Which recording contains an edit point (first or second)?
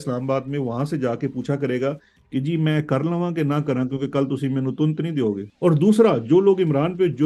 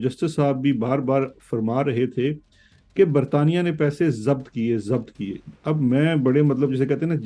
first